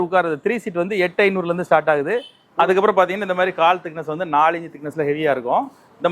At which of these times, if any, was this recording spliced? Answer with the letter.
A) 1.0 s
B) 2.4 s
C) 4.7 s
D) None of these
B